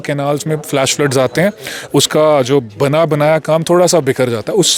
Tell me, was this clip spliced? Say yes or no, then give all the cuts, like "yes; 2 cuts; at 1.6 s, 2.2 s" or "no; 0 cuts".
no; 0 cuts